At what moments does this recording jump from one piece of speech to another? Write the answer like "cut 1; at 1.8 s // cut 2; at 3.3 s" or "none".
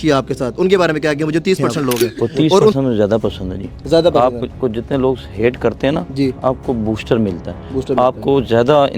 cut 1; at 2.7 s